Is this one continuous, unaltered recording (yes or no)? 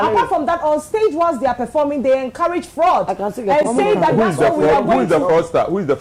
yes